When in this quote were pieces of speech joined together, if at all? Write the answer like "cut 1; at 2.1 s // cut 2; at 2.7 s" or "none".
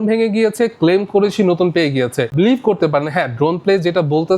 cut 1; at 2.3 s